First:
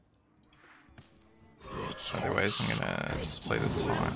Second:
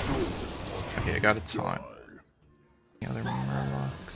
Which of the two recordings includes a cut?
second; 1 cut; at 3.0 s

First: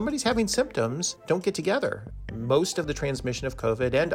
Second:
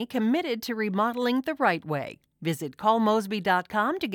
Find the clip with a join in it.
first; 2 cuts; at 1.1 s, 2.3 s

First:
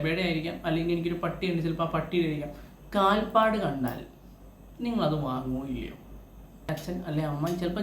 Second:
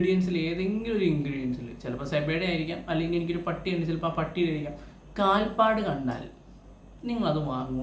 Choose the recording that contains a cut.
first; 1 cut; at 6.7 s

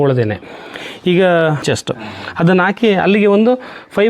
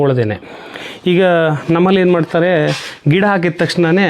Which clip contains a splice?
first; 1 cut; at 1.6 s

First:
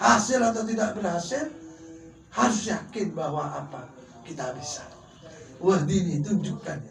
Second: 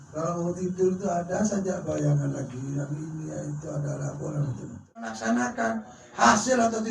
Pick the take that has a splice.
second; 1 cut; at 5.2 s

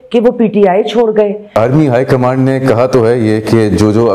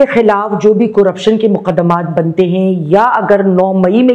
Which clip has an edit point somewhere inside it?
first; 1 cut; at 1.5 s

